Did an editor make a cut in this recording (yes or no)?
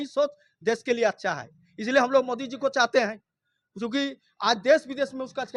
no